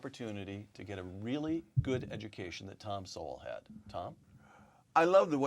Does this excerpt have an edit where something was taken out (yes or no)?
yes